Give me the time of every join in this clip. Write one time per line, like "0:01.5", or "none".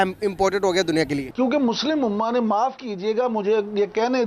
0:01.2